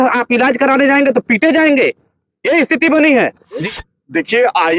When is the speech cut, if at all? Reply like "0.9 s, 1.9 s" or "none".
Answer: 3.7 s